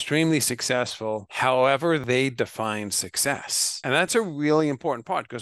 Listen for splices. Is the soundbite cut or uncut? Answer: cut